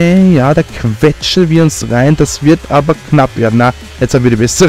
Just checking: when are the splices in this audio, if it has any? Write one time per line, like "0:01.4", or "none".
none